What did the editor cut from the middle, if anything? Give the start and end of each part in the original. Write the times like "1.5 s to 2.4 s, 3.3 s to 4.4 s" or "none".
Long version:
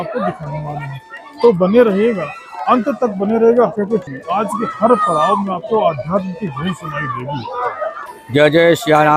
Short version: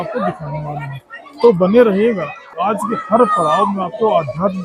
2.5 s to 4.2 s